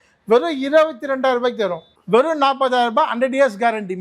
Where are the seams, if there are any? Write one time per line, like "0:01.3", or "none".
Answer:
0:01.9